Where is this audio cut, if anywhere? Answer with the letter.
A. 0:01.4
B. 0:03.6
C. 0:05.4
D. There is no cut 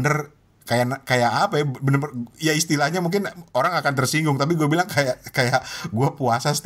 D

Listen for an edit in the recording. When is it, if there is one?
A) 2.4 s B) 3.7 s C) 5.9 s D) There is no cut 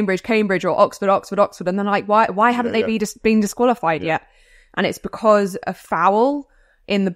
D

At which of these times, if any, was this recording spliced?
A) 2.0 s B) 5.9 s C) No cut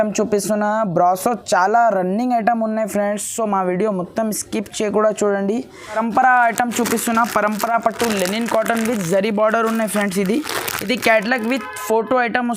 B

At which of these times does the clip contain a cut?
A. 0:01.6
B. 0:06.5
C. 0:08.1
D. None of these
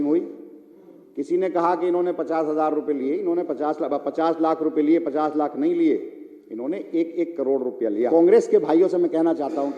C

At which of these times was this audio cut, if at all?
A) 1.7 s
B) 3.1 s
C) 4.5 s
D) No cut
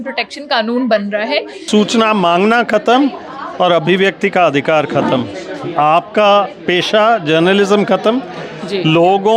A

